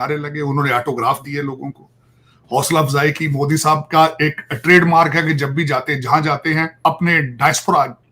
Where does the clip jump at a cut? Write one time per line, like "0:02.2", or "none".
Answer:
0:06.8